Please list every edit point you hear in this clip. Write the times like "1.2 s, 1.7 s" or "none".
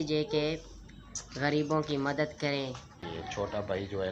3.0 s